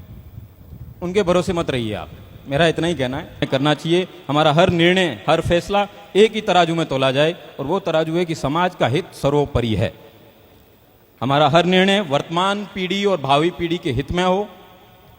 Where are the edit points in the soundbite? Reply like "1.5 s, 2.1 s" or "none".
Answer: 3.5 s